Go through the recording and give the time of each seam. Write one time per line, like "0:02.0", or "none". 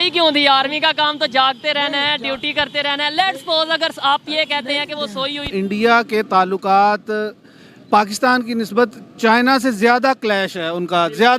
0:05.5

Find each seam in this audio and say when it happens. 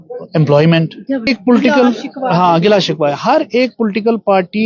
0:01.3

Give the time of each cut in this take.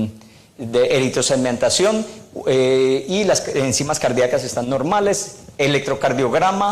0:03.2

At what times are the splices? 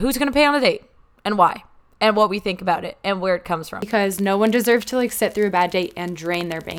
0:03.9

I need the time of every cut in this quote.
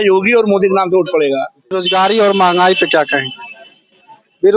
0:01.7

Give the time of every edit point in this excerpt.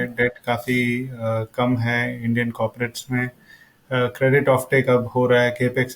none

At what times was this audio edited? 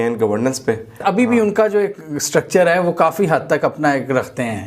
0:01.0

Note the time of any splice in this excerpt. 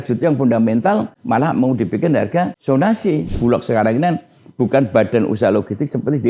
0:01.2
0:02.6
0:03.4

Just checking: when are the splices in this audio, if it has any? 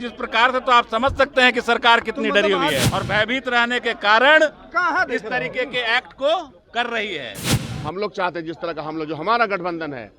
0:02.8
0:07.5

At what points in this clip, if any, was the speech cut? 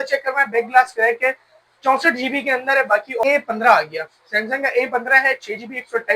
0:03.2

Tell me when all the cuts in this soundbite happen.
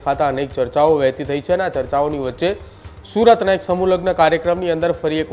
none

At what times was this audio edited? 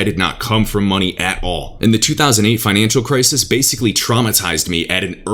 none

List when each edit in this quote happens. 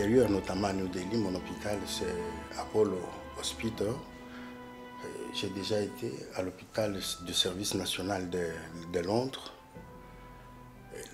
none

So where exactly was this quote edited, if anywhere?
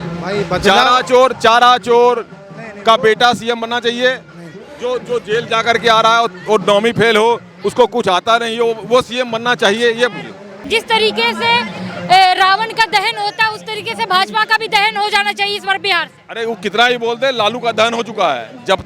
0:10.5

